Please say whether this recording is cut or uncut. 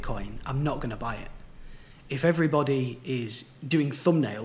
uncut